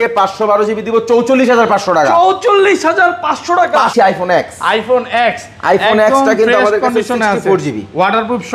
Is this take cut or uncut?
cut